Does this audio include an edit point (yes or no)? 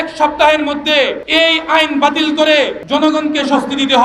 yes